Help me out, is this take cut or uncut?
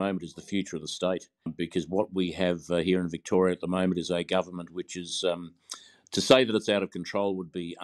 cut